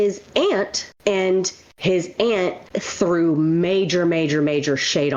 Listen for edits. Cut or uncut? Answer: uncut